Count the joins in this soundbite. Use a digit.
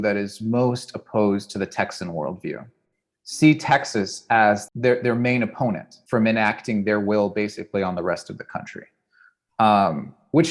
2